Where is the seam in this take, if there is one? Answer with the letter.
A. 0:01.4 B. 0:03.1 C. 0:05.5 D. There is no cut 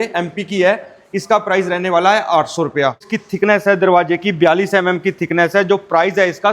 B